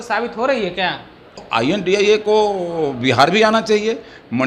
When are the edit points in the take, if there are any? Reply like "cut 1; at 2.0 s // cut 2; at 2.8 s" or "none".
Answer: cut 1; at 1.4 s